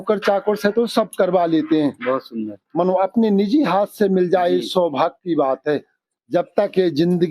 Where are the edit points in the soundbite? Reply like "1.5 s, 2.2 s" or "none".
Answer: 6.0 s